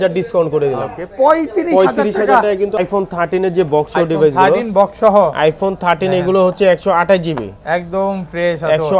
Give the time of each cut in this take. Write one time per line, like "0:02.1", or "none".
0:02.8